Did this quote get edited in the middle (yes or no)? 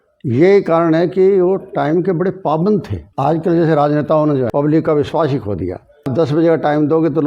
yes